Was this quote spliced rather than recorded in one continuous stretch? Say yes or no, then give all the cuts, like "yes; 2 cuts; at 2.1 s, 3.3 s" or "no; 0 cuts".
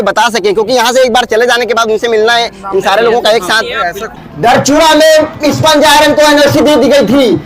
yes; 1 cut; at 4.2 s